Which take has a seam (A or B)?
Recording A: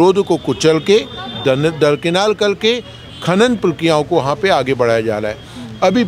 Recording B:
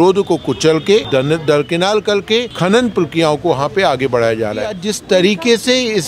B